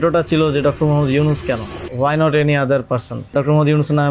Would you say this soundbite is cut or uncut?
cut